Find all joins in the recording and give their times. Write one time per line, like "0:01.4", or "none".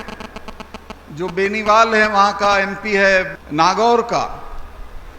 0:03.4

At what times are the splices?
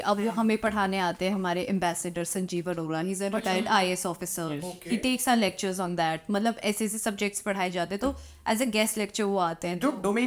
none

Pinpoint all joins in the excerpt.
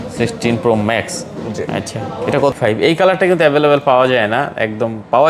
0:02.5

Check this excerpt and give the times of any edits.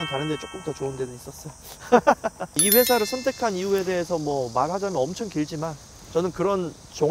0:02.6

